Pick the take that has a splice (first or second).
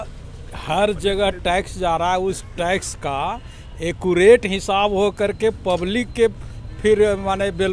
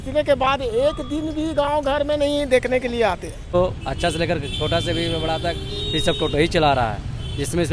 second